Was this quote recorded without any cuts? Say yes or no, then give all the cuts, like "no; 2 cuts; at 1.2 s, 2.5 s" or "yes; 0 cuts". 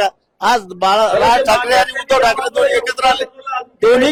yes; 0 cuts